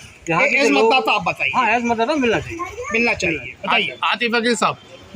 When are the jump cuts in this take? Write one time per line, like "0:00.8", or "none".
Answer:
0:03.5